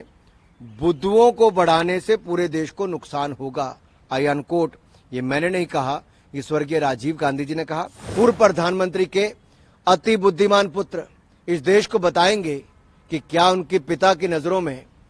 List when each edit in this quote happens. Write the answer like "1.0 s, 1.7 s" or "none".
8.0 s